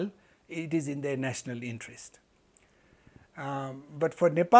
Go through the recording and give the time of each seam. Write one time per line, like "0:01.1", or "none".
none